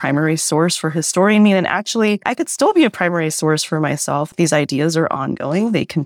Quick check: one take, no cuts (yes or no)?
no